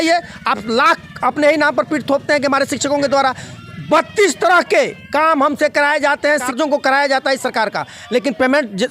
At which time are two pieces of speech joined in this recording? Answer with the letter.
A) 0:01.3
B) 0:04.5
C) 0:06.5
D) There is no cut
C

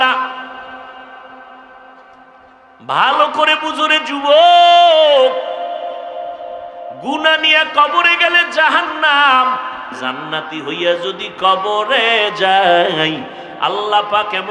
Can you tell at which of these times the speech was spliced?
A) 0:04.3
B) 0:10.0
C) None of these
B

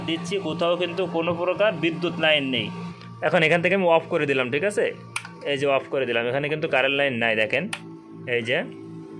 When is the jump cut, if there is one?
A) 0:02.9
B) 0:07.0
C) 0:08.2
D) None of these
A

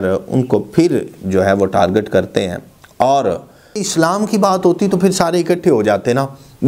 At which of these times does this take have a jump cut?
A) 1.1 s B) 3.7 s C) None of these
B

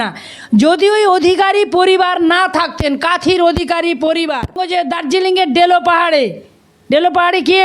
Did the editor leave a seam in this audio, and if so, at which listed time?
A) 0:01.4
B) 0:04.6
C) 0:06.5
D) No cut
B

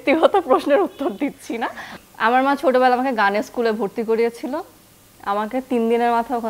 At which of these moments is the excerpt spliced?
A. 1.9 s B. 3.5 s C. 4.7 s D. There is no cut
A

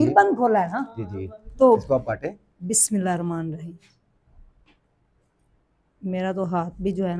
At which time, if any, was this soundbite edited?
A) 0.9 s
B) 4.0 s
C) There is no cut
C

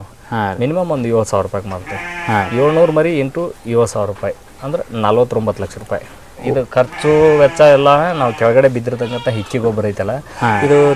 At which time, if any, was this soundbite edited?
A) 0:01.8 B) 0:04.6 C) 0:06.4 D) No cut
C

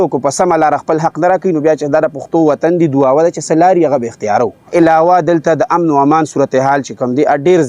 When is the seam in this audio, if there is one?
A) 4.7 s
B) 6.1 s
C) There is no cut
A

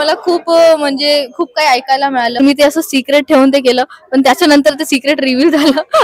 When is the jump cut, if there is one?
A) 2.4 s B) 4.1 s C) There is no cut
A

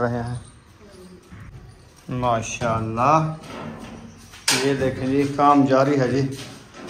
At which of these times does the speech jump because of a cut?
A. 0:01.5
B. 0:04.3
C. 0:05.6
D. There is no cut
A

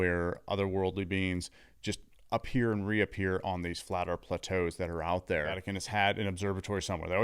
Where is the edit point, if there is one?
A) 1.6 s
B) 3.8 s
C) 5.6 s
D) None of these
C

